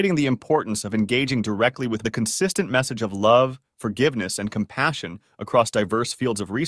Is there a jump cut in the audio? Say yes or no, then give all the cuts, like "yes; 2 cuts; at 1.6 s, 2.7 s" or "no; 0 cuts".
yes; 1 cut; at 2.0 s